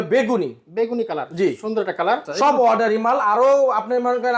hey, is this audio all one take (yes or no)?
no